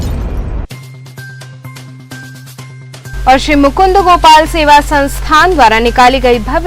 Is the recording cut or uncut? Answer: uncut